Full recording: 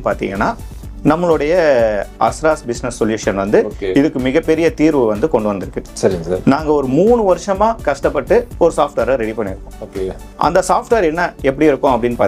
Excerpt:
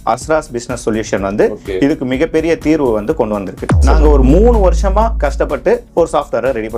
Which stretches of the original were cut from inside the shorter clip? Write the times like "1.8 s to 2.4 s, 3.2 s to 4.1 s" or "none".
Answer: 6.1 s to 6.6 s